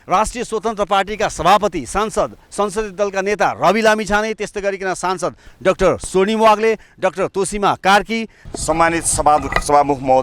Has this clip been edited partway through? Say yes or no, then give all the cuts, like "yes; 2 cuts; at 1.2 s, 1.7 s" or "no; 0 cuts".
yes; 1 cut; at 8.4 s